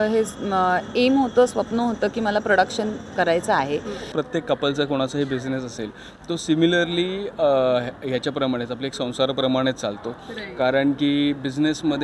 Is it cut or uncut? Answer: cut